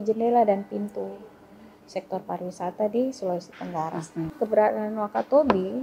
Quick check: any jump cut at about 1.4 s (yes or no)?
no